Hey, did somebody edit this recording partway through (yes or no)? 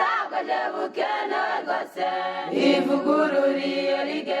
yes